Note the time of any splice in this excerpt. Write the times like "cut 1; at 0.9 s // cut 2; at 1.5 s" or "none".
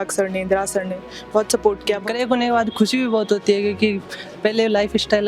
cut 1; at 2.0 s